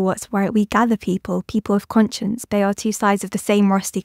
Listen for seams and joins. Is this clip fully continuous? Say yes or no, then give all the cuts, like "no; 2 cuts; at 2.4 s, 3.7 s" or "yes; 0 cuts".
no; 1 cut; at 2.4 s